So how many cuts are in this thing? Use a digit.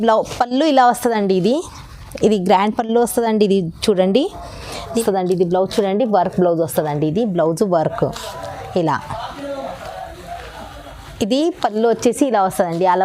1